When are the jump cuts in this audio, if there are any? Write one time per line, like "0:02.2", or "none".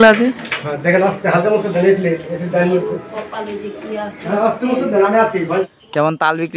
0:05.7